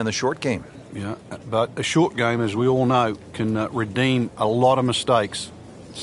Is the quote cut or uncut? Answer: uncut